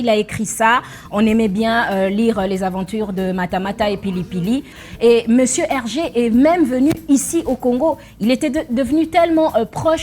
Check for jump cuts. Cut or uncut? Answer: cut